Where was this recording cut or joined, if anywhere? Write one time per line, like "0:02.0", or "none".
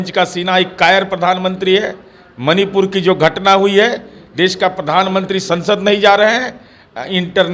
none